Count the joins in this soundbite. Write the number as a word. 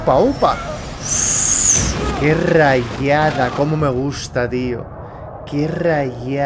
zero